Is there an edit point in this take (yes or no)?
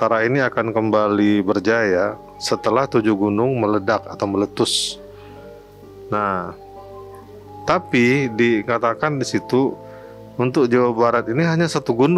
no